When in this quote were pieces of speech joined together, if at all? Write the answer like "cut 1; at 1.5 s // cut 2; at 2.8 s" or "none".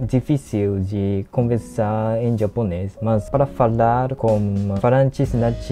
cut 1; at 2.9 s // cut 2; at 4.3 s

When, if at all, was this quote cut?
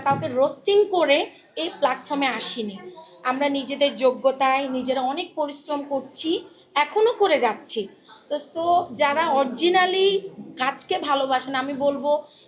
none

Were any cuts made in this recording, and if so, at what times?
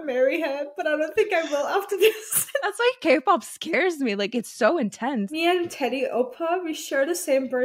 cut 1; at 2.7 s // cut 2; at 5.3 s

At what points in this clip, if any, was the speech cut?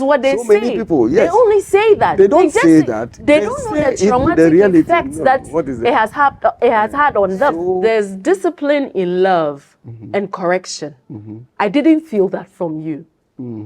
cut 1; at 7.7 s

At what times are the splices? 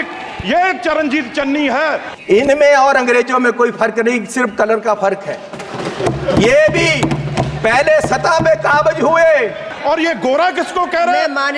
cut 1; at 2.1 s // cut 2; at 9.7 s

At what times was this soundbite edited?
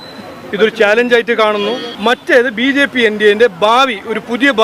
cut 1; at 1.9 s

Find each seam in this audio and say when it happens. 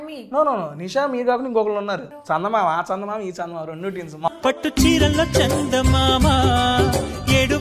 cut 1; at 2.1 s // cut 2; at 4.3 s

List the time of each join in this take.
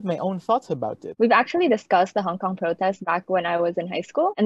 cut 1; at 1.0 s

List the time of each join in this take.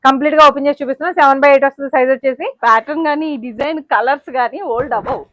cut 1; at 2.5 s

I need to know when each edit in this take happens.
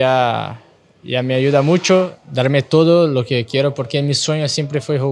cut 1; at 2.1 s

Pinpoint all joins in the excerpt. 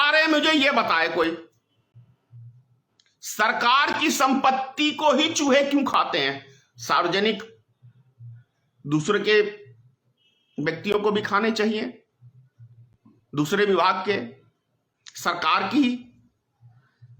none

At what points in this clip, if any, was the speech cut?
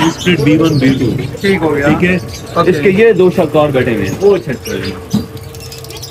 none

